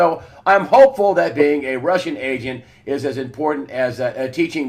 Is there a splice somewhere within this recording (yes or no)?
yes